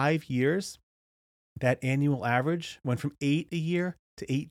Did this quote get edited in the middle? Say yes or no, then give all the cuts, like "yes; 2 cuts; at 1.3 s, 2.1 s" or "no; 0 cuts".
no; 0 cuts